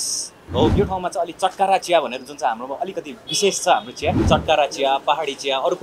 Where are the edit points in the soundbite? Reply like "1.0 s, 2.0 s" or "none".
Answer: 0.7 s, 4.2 s